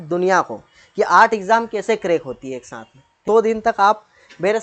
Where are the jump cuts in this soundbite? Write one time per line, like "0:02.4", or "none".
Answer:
0:03.1